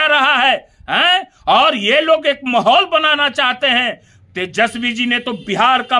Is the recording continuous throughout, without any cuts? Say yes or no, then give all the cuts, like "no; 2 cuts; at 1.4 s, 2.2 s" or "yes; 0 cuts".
yes; 0 cuts